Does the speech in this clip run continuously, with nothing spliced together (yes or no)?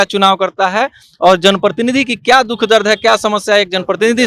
yes